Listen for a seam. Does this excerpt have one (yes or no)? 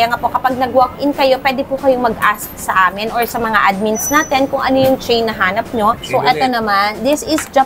yes